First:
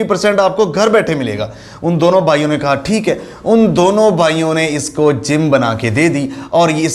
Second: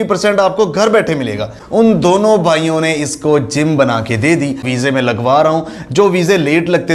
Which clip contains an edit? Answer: second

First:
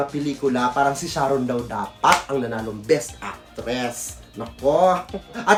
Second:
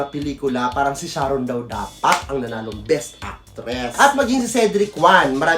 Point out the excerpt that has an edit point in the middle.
second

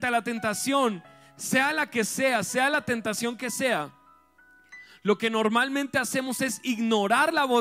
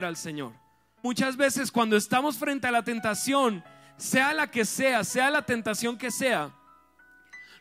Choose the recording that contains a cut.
second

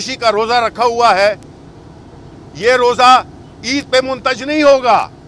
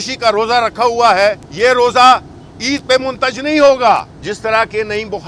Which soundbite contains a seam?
second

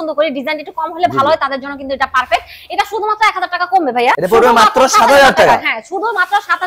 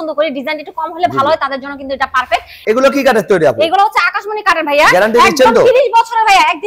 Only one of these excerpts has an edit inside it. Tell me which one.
second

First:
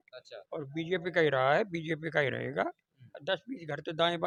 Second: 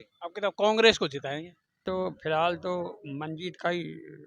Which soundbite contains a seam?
second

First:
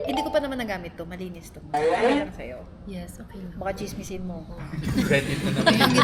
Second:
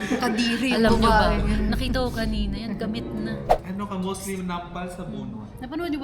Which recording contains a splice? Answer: second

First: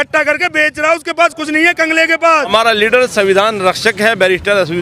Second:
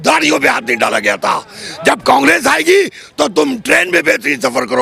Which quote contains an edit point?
first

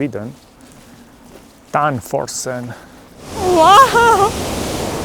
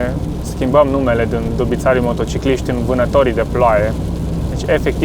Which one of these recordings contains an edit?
first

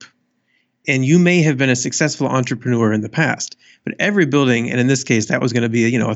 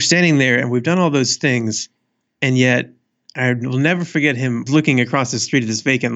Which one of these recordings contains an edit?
second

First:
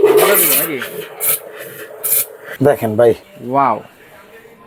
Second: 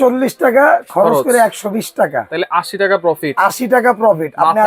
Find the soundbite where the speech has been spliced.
first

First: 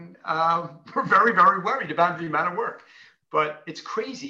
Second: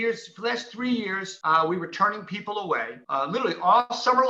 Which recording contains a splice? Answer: second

